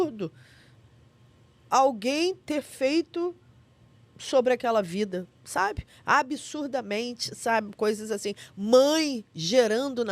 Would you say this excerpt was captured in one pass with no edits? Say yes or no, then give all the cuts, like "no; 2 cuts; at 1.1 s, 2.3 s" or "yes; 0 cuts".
yes; 0 cuts